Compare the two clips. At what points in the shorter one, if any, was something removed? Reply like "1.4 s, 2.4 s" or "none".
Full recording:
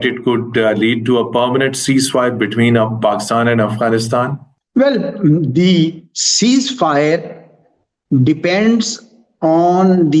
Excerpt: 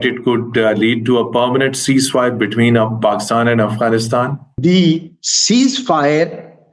4.5 s